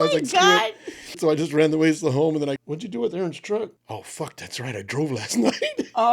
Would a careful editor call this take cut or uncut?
cut